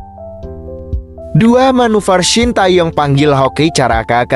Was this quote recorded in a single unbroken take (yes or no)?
no